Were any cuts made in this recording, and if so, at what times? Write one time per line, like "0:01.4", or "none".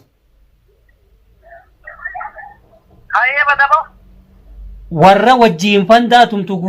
none